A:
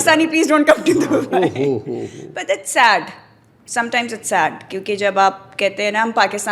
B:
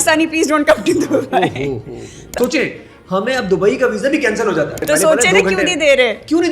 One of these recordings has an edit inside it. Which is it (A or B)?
B